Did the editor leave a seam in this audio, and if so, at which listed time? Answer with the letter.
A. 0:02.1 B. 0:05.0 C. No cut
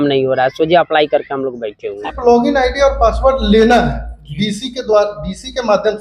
A